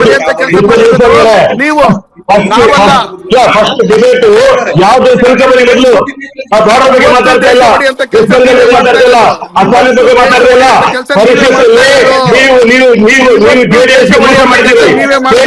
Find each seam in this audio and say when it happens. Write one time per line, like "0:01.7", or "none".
none